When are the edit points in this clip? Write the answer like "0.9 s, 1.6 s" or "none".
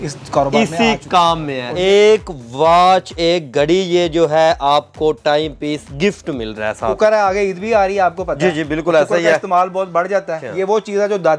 1.8 s, 7.0 s, 10.4 s